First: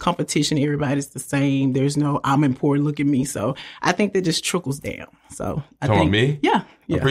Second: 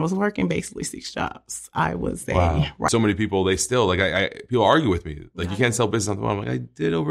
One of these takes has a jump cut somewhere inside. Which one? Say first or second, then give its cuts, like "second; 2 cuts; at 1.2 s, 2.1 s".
second; 1 cut; at 2.9 s